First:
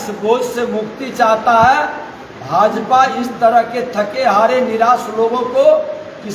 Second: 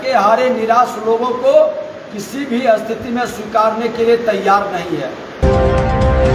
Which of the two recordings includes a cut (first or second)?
second